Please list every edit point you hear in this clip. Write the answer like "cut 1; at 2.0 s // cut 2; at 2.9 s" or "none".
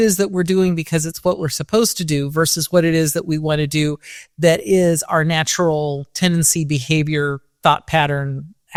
none

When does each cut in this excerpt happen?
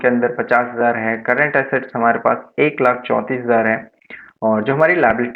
none

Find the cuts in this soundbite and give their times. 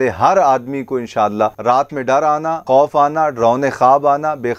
cut 1; at 2.6 s

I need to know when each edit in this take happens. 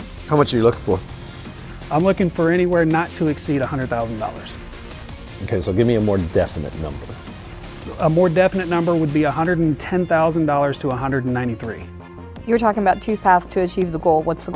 cut 1; at 7.6 s

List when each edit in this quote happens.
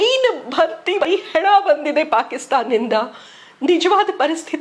cut 1; at 1.0 s

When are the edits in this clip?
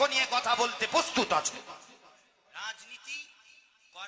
cut 1; at 1.9 s

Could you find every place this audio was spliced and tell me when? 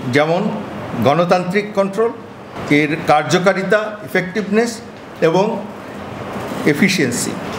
none

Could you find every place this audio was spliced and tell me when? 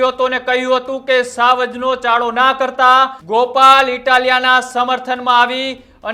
cut 1; at 3.2 s

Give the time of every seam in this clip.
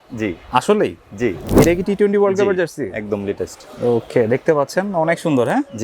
cut 1; at 1.5 s

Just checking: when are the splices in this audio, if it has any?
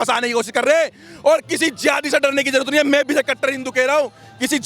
none

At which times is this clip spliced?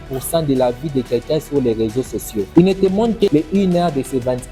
none

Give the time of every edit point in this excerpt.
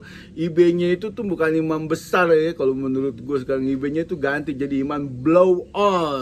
none

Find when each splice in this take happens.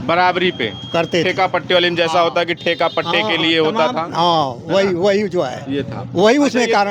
none

